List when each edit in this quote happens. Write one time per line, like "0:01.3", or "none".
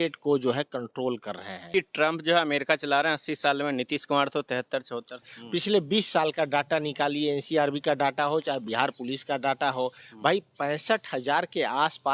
0:01.7
0:05.3